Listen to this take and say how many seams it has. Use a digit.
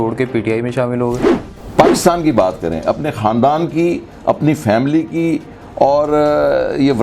1